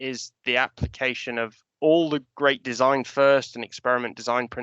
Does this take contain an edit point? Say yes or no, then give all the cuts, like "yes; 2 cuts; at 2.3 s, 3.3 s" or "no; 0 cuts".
yes; 1 cut; at 1.6 s